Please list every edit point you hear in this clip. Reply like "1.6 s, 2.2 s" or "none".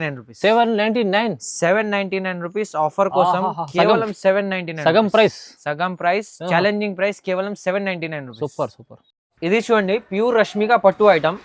none

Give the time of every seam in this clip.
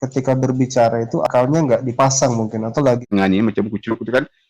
3.1 s

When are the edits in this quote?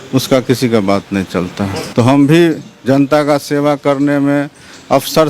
1.8 s

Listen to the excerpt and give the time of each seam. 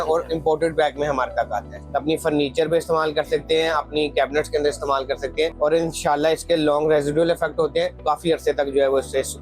1.7 s, 5.5 s, 8.0 s

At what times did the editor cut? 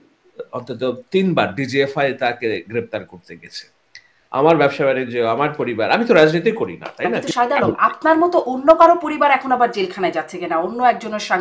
7.2 s

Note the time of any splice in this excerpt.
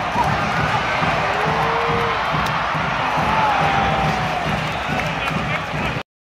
none

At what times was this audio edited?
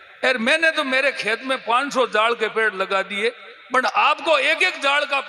none

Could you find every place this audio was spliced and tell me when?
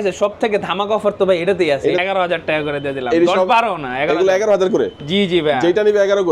2.0 s

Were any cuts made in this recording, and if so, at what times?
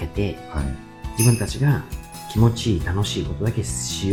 none

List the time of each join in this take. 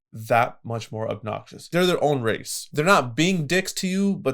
1.7 s, 2.5 s

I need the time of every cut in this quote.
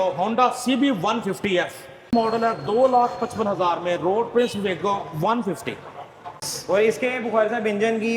2.1 s, 6.5 s

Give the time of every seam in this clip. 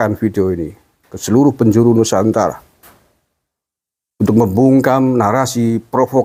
none

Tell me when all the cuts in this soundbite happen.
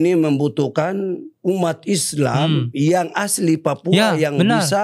1.3 s

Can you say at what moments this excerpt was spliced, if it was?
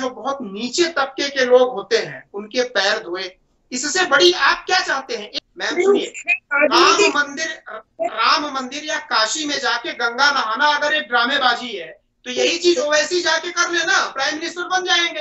5.2 s

